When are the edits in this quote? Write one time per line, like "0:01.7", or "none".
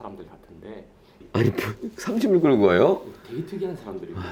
0:01.2